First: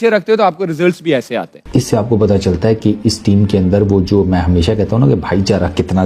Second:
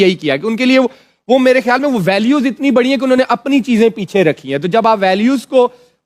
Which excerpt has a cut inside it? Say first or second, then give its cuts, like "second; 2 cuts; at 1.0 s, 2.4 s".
first; 1 cut; at 1.6 s